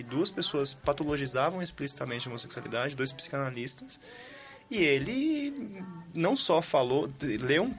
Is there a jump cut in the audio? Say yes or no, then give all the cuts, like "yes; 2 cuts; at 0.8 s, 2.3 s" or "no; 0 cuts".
no; 0 cuts